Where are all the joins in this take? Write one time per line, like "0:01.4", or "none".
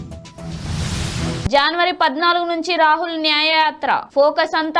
0:01.5